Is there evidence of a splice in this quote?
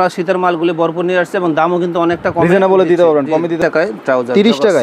yes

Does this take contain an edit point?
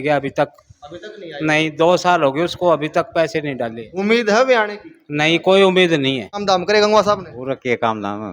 yes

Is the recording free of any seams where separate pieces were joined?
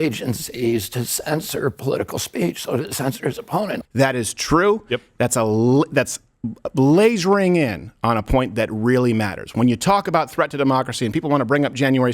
no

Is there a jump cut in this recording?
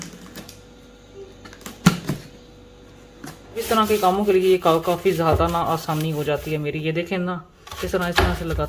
yes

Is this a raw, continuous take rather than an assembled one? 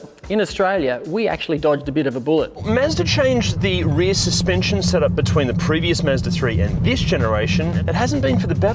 no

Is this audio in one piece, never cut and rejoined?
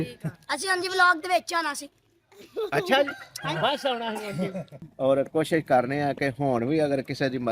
no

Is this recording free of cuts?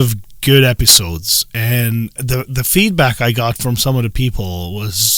yes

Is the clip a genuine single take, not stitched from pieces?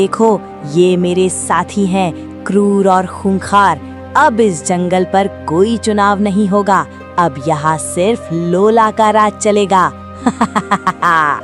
yes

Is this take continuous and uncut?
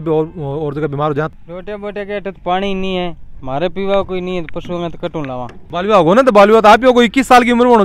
no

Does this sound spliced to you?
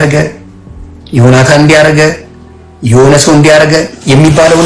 no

